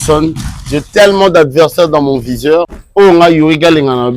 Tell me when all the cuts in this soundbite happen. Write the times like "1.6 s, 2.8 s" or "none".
2.8 s